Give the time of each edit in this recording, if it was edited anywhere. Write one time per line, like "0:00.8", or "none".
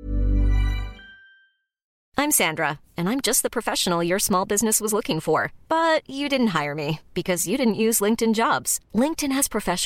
0:01.9